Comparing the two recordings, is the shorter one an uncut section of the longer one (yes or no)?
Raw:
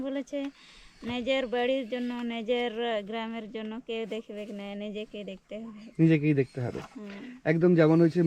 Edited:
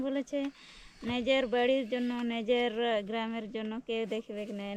yes